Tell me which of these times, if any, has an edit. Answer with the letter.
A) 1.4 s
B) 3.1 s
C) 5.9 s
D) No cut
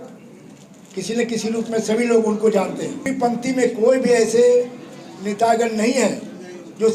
B